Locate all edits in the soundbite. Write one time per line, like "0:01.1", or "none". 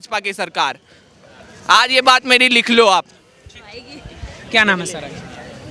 none